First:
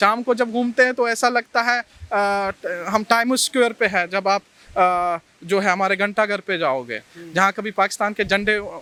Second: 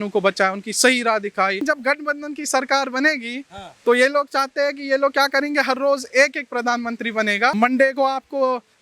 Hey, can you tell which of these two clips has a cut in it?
second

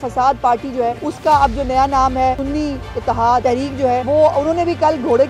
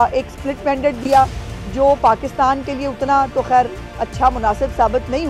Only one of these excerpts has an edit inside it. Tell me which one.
first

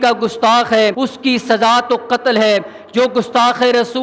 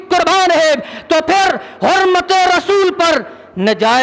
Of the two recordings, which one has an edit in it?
first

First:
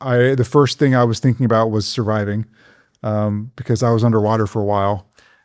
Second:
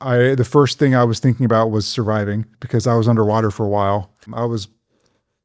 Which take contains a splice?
second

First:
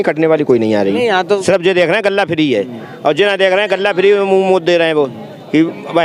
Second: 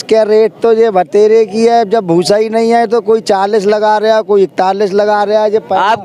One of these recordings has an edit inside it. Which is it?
first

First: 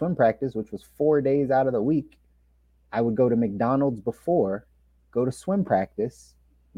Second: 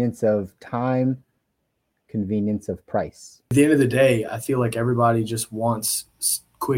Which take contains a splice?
second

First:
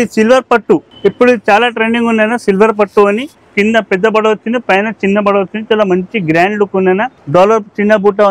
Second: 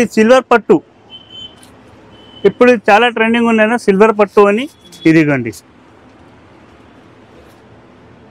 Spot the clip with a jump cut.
first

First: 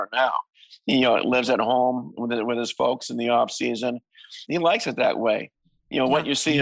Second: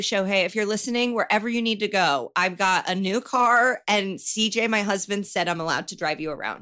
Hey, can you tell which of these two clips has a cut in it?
first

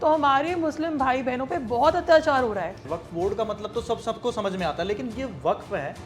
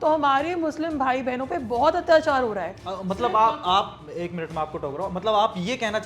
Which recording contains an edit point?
first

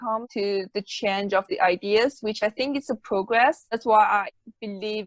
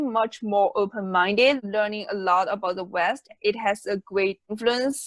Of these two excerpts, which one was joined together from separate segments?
second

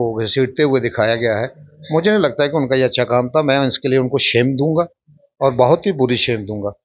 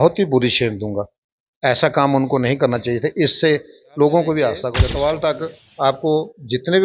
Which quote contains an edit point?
second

